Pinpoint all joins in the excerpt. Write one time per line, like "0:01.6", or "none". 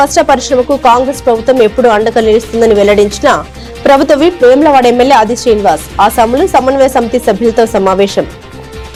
none